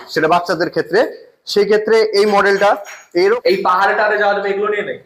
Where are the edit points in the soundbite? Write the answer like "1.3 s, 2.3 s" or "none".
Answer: 3.0 s